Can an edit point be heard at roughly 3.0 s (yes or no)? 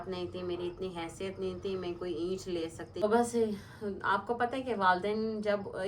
yes